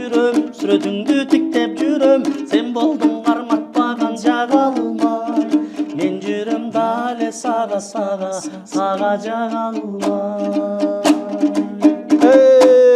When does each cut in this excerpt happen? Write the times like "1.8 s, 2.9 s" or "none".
none